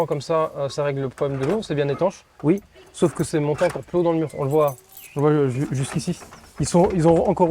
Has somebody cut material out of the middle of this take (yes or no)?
no